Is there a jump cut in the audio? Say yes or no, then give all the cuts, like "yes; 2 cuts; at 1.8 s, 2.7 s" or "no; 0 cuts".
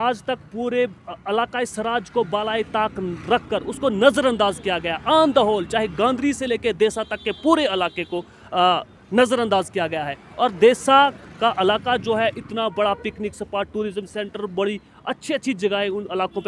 no; 0 cuts